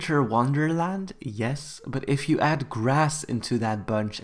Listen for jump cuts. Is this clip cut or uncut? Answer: uncut